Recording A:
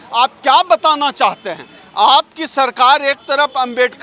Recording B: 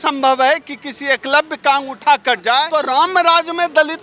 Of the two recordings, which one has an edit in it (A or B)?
B